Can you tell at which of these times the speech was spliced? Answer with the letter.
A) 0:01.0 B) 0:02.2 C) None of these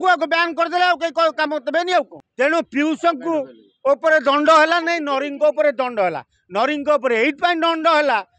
B